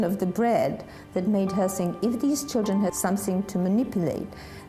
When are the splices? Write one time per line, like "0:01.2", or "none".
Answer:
0:03.0